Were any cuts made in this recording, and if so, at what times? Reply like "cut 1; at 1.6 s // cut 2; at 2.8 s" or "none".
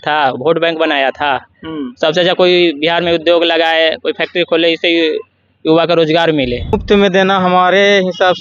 cut 1; at 6.7 s